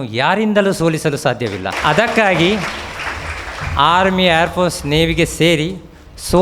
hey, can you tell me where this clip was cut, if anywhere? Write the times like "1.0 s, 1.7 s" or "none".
1.7 s